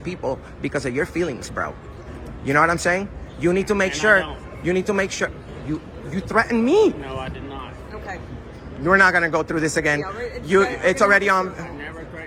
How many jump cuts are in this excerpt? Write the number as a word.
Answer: zero